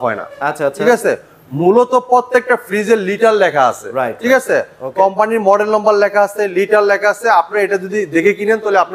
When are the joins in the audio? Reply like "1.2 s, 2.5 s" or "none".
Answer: none

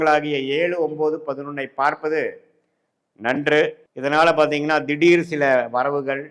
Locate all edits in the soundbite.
none

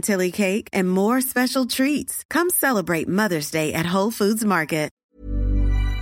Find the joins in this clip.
4.9 s

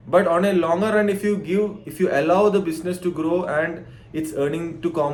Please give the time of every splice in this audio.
none

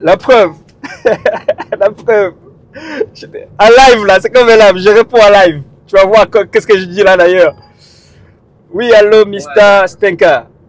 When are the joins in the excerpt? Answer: none

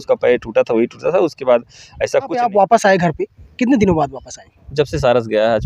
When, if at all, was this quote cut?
2.5 s

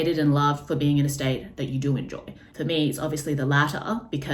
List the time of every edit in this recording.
none

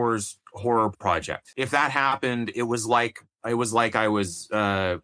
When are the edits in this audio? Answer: 1.5 s

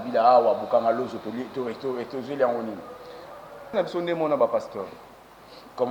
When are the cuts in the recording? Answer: 3.7 s

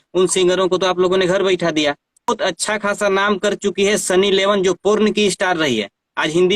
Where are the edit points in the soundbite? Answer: 2.3 s

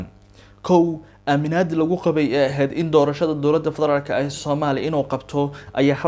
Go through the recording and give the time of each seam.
none

